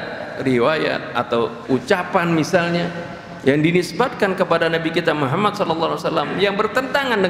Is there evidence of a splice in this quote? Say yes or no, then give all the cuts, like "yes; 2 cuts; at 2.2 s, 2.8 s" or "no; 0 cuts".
yes; 1 cut; at 1.6 s